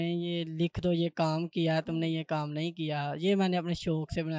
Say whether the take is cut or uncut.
uncut